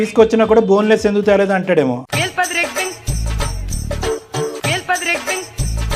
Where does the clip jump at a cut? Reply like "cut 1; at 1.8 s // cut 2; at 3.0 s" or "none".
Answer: none